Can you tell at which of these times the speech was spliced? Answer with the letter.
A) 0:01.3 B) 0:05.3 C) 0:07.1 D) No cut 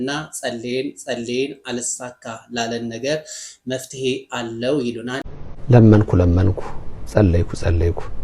B